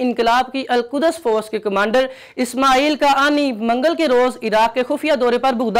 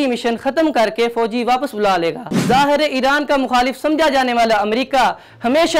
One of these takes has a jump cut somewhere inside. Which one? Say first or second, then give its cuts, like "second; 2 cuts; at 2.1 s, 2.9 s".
second; 1 cut; at 2.3 s